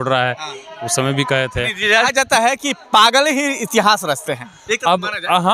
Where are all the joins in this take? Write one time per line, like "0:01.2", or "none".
0:02.1